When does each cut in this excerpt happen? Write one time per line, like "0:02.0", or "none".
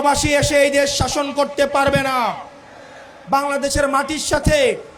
0:03.2